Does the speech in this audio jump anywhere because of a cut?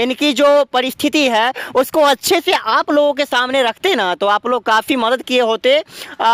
no; 0 cuts

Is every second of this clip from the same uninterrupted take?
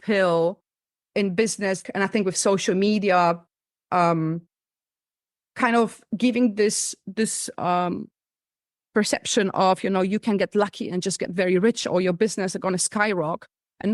no; 1 cut; at 1.8 s

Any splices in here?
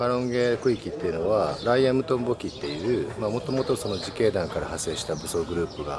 no; 0 cuts

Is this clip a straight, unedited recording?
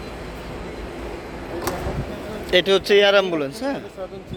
yes; 0 cuts

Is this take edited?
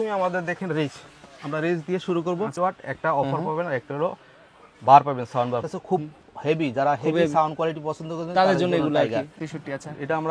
yes; 3 cuts; at 2.5 s, 5.6 s, 9.4 s

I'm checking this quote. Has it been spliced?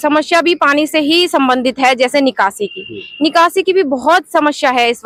no; 0 cuts

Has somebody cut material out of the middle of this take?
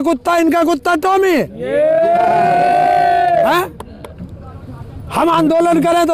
no; 0 cuts

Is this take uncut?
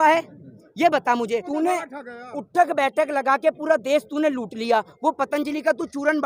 no; 1 cut; at 1.5 s

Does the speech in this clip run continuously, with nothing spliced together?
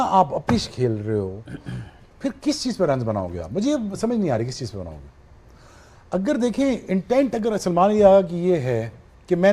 yes; 0 cuts

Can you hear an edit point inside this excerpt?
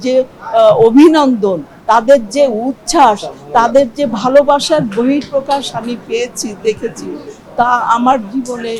no; 0 cuts

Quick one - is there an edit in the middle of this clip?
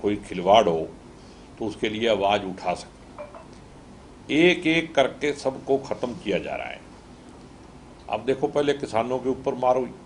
no; 0 cuts

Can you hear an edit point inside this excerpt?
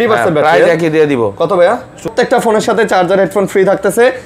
yes; 1 cut; at 2.1 s

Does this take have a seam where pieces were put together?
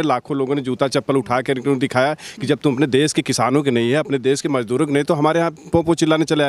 no; 0 cuts

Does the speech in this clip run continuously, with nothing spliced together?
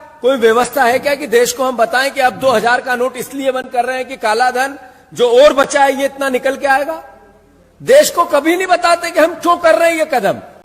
yes; 0 cuts

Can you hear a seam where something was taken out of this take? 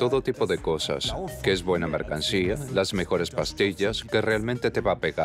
no; 0 cuts

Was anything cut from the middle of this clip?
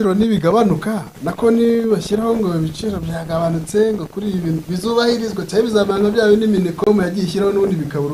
no; 0 cuts

